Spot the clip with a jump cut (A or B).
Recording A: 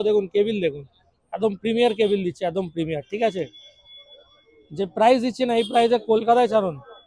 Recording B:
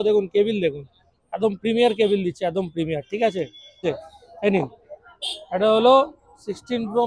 B